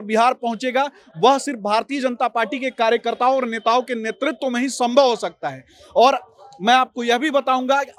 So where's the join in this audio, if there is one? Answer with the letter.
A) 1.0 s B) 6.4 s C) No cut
C